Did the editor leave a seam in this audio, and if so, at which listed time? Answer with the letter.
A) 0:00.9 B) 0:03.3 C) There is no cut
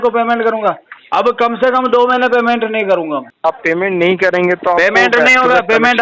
B